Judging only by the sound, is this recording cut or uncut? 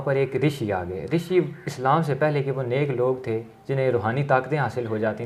uncut